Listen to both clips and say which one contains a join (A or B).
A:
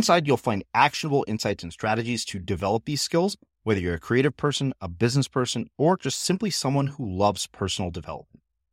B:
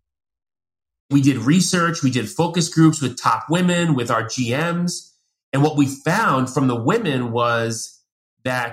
B